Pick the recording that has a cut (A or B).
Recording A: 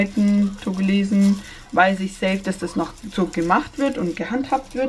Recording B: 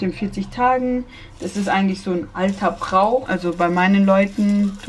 B